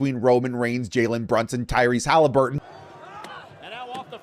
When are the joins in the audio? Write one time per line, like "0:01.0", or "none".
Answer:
0:02.6